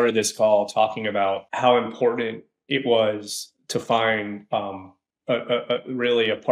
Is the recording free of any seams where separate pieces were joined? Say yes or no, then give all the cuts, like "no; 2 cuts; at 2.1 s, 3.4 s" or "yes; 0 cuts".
no; 1 cut; at 1.5 s